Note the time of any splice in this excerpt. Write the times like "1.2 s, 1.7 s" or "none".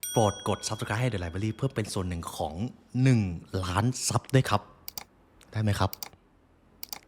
none